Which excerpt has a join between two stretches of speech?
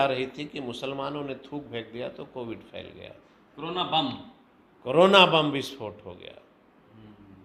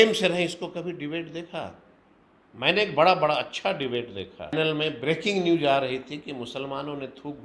second; 1 cut; at 4.5 s

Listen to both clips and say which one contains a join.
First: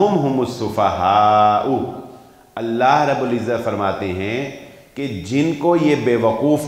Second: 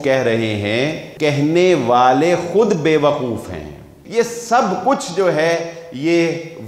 second; 2 cuts; at 1.0 s, 4.0 s

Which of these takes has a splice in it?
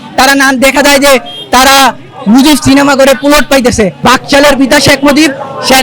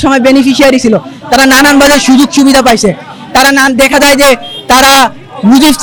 first; 1 cut; at 3.9 s

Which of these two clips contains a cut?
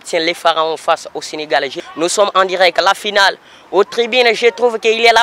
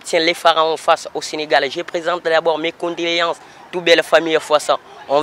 first; 1 cut; at 1.8 s

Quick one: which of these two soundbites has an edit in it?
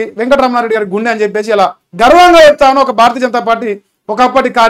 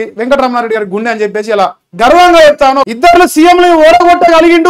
second; 1 cut; at 2.9 s

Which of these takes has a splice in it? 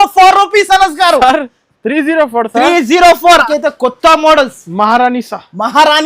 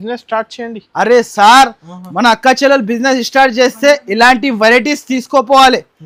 first; 1 cut; at 3.5 s

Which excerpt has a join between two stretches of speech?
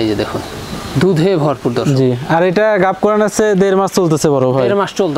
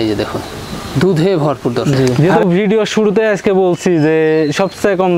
second; 1 cut; at 2.2 s

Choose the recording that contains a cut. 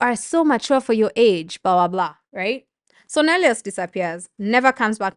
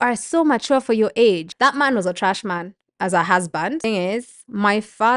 second; 2 cuts; at 1.5 s, 3.8 s

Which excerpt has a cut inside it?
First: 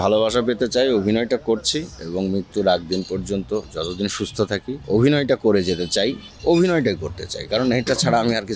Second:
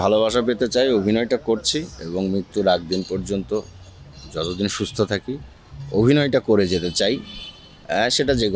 first; 3 cuts; at 3.7 s, 4.8 s, 6.3 s

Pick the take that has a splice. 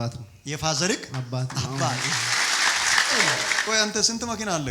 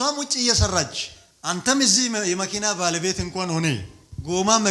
first; 1 cut; at 3.5 s

